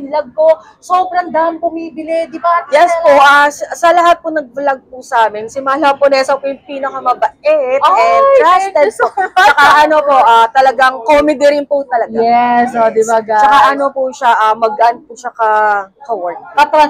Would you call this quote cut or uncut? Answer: uncut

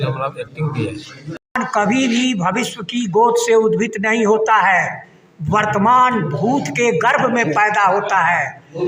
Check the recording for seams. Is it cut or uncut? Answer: cut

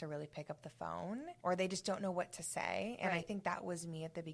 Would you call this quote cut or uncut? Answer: uncut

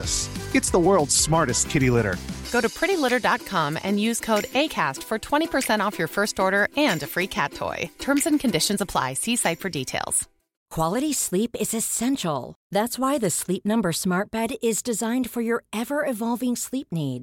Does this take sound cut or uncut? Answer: cut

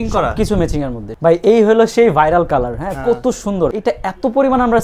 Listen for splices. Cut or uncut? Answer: cut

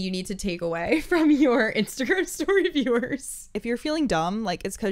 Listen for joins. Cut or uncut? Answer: cut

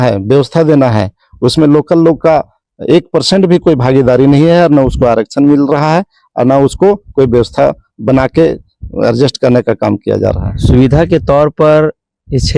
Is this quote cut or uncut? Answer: uncut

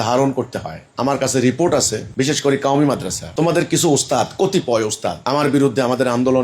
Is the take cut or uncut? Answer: cut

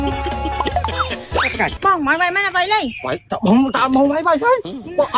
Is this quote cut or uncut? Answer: cut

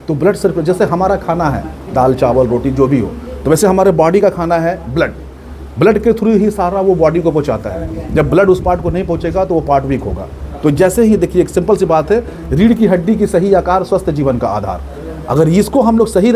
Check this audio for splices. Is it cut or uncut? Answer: uncut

